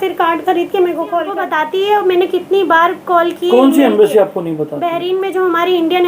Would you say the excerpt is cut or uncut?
cut